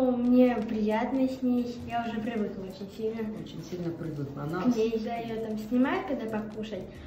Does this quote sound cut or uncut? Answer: cut